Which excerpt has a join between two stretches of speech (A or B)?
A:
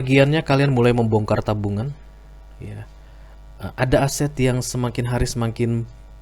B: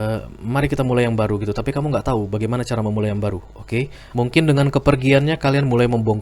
B